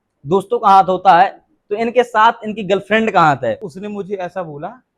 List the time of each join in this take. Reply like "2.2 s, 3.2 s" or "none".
3.7 s